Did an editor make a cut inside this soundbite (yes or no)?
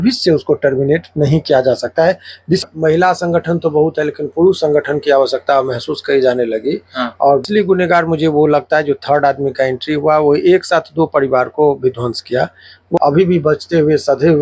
yes